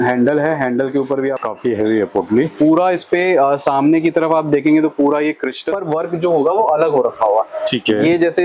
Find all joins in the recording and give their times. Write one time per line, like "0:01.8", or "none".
0:01.4
0:05.7